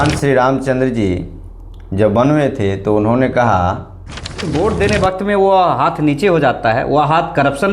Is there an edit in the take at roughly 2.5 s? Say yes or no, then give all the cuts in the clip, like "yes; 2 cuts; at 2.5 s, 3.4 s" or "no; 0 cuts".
no; 1 cut; at 4.5 s